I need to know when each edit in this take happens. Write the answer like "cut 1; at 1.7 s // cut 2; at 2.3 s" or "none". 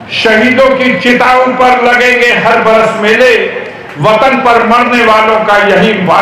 none